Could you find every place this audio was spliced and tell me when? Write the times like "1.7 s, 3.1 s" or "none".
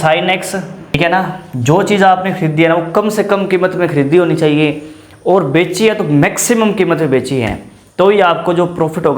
1.0 s